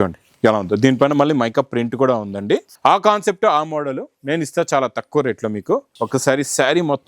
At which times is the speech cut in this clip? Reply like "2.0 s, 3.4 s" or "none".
2.7 s, 5.9 s

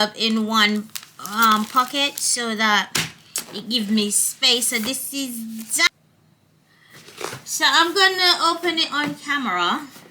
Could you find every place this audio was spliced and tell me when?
5.9 s

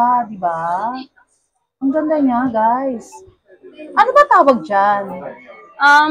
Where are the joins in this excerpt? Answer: none

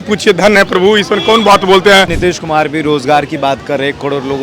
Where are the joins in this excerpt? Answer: 2.1 s

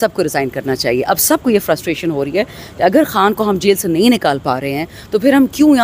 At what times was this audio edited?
none

